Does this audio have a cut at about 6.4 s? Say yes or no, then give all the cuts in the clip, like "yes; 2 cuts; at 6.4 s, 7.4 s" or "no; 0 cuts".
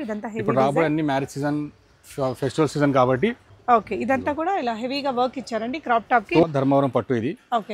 yes; 2 cuts; at 3.5 s, 6.4 s